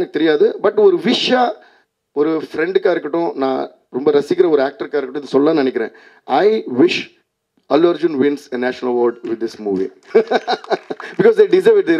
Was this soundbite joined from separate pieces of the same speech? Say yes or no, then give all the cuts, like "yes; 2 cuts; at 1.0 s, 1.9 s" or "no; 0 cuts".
yes; 1 cut; at 10.0 s